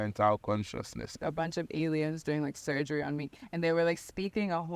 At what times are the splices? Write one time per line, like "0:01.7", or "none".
0:01.2